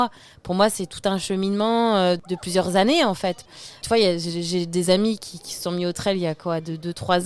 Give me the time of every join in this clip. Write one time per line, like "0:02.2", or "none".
0:02.2
0:03.8